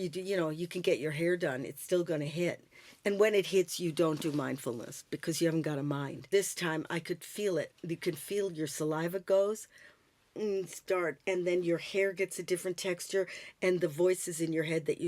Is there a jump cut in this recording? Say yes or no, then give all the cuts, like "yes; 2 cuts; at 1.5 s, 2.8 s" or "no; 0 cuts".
yes; 1 cut; at 6.3 s